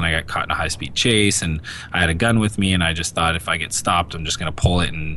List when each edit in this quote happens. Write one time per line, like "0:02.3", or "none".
none